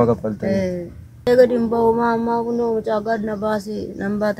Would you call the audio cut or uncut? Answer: cut